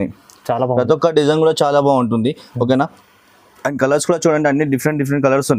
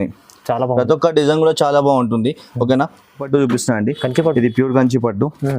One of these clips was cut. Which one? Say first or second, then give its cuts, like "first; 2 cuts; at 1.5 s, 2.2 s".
second; 1 cut; at 3.2 s